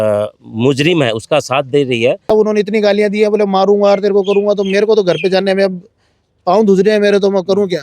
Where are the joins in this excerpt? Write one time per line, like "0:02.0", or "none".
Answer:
0:02.3